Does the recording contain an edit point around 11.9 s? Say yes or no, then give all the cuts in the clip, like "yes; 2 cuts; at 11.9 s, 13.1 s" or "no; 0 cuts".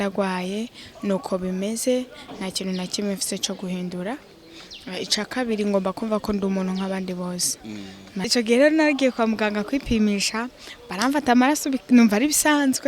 no; 1 cut; at 8.1 s